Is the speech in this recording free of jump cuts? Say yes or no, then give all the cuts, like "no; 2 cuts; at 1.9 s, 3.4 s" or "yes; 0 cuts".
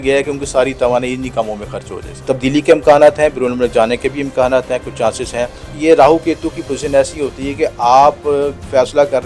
no; 2 cuts; at 2.1 s, 5.8 s